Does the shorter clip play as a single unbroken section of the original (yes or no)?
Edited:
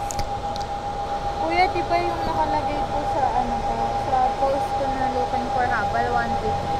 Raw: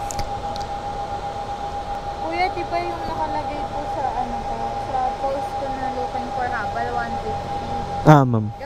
no